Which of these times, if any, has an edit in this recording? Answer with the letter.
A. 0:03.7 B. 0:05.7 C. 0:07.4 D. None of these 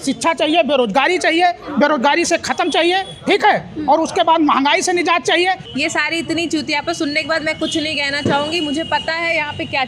B